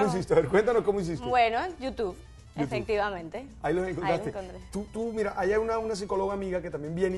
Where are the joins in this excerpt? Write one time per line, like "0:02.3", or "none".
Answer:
0:04.6